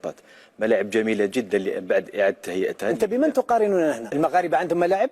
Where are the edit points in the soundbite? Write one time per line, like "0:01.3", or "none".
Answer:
0:04.1